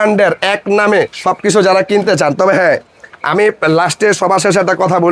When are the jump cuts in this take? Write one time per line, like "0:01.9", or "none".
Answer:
none